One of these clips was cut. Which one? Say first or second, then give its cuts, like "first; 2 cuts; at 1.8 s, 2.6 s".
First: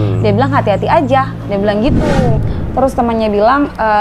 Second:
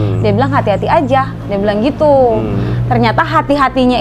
first; 1 cut; at 2.1 s